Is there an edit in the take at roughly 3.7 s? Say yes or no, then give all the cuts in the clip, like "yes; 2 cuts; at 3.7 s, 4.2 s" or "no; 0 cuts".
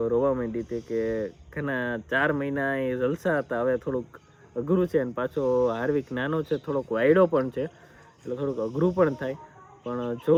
no; 0 cuts